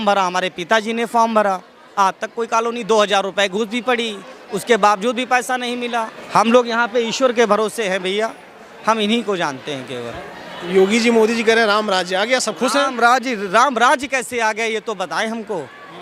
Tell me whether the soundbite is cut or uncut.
cut